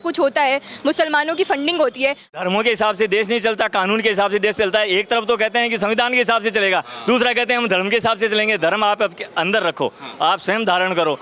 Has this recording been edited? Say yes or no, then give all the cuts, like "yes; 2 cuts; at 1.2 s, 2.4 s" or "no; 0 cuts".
yes; 1 cut; at 2.3 s